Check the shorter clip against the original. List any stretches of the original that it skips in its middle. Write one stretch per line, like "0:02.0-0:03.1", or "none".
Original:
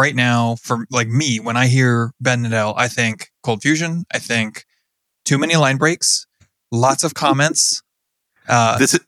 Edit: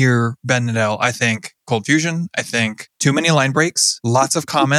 0:04.6-0:05.1
0:06.1-0:06.6